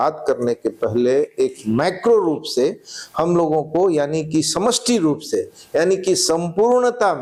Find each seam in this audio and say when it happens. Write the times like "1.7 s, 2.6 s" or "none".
none